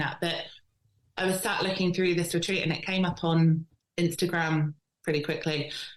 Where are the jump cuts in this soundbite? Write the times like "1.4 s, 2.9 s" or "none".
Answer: 3.8 s